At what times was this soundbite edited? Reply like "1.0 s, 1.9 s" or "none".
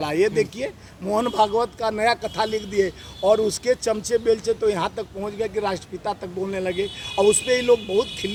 none

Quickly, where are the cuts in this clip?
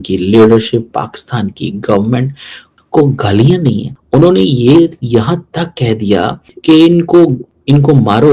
3.9 s

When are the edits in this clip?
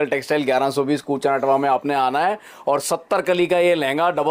none

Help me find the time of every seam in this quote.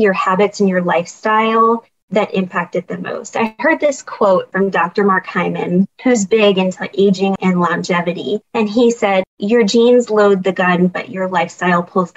4.5 s, 5.9 s, 7.4 s, 8.5 s, 9.3 s

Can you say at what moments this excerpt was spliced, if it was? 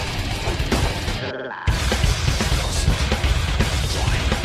none

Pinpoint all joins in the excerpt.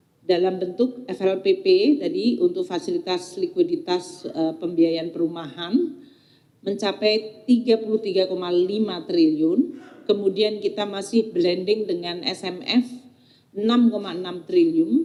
none

